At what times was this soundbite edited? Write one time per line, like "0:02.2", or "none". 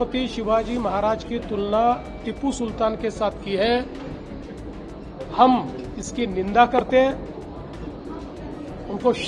none